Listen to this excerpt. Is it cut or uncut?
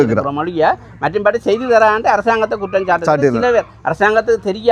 uncut